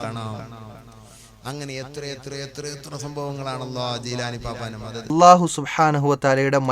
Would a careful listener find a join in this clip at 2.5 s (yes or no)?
no